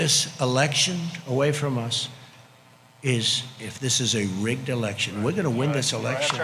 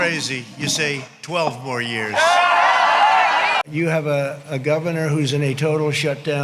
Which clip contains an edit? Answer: second; 1 cut; at 3.6 s

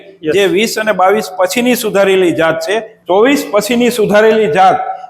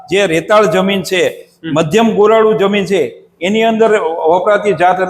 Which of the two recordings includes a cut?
first; 1 cut; at 2.9 s

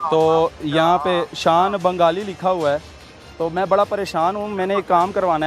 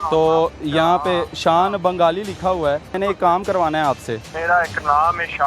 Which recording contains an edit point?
second; 2 cuts; at 2.9 s, 4.3 s

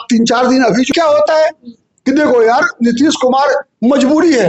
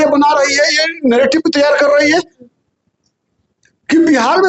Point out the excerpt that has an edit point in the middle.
first; 1 cut; at 0.9 s

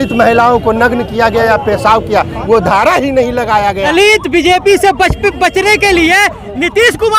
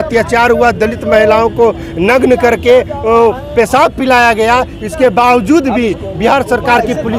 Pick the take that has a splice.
first; 1 cut; at 3.8 s

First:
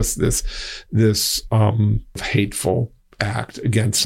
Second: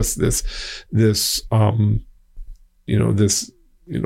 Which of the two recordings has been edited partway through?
first; 2 cuts; at 2.2 s, 3.0 s

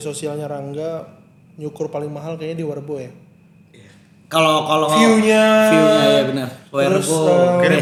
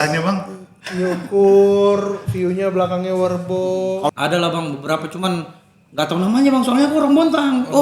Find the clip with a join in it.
second; 1 cut; at 4.1 s

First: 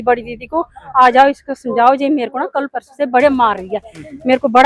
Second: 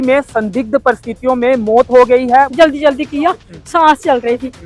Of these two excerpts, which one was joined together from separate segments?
second; 1 cut; at 2.2 s

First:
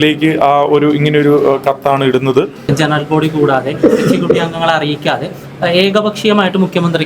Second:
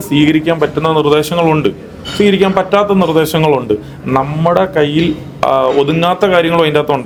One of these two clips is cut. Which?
first; 1 cut; at 2.6 s

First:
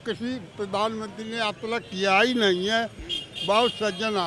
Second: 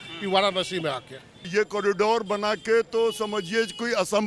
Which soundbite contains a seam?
second; 1 cut; at 1.5 s

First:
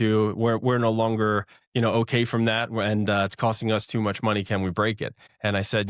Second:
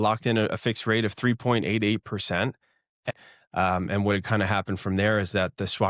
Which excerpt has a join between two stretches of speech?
second; 1 cut; at 3.1 s

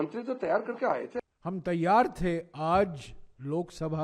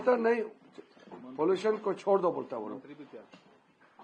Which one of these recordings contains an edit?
first; 1 cut; at 1.2 s

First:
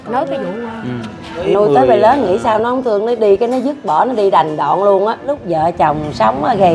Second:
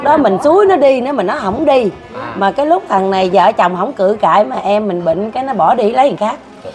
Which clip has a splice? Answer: first; 2 cuts; at 1.4 s, 5.2 s

